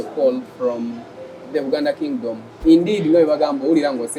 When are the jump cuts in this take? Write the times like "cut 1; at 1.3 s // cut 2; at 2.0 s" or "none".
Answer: cut 1; at 2.5 s